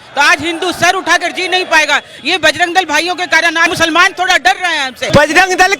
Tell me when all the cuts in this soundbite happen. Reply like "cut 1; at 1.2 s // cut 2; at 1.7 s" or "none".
cut 1; at 3.7 s // cut 2; at 5.1 s